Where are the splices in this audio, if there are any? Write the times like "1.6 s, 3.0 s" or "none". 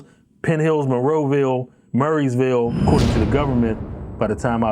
2.8 s